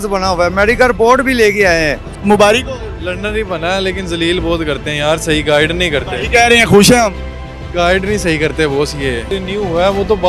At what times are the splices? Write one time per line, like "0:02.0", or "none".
0:02.1
0:09.3